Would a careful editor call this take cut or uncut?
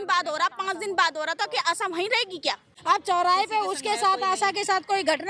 cut